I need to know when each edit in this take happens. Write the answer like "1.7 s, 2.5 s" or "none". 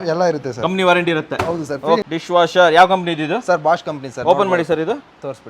2.0 s